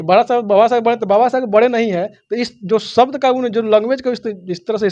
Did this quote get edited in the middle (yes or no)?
no